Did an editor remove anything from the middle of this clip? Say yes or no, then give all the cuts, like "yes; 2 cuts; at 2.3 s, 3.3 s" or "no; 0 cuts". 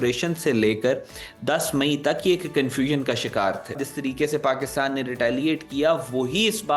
yes; 1 cut; at 3.8 s